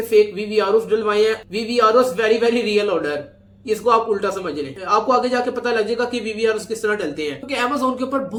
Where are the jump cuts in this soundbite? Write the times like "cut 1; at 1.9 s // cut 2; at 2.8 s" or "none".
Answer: none